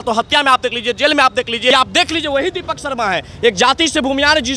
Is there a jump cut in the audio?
yes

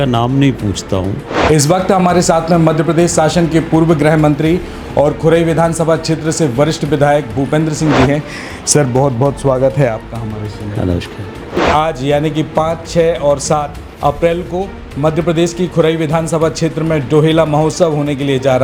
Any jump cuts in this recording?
yes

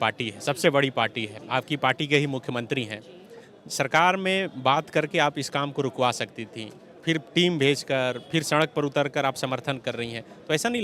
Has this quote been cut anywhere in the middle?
no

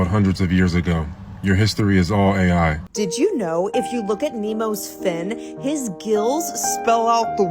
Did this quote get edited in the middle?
yes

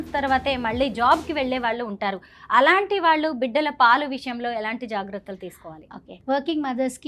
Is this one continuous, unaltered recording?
yes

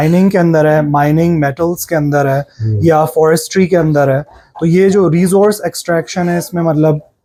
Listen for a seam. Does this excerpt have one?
no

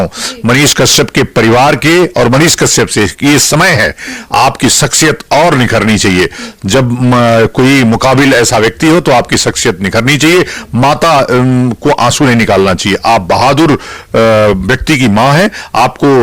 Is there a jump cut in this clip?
no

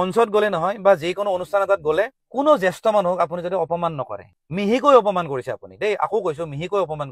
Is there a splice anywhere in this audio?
no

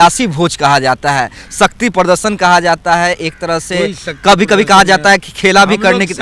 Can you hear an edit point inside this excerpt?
no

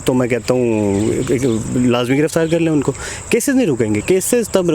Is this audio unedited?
yes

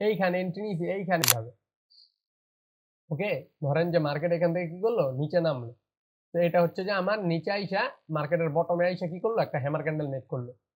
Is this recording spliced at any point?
yes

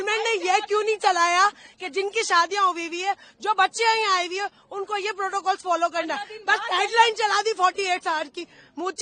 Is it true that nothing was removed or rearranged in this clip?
yes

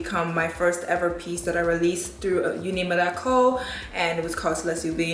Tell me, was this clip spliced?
no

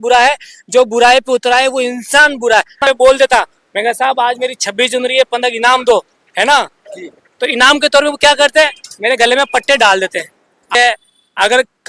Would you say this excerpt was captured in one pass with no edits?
no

